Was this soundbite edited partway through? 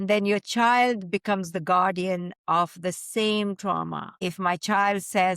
yes; 1 cut; at 4.1 s

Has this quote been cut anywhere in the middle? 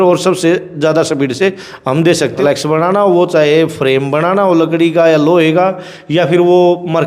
yes; 1 cut; at 2.4 s

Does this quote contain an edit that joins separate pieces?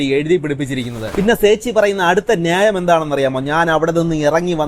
yes; 1 cut; at 1.0 s

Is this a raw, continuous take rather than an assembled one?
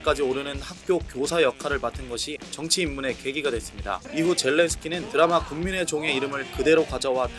no; 3 cuts; at 2.4 s, 4.0 s, 5.0 s

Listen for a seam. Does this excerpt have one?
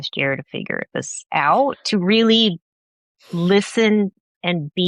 no; 0 cuts

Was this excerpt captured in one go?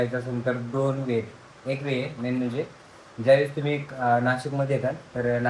yes; 0 cuts

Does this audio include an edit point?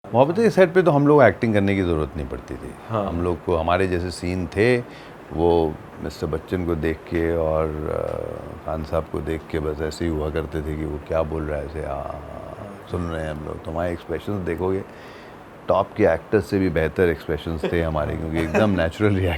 no; 0 cuts

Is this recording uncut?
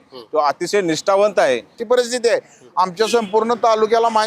no; 1 cut; at 1.8 s

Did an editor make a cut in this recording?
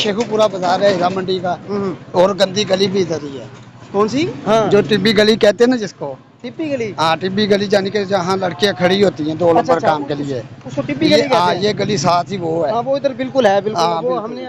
no; 0 cuts

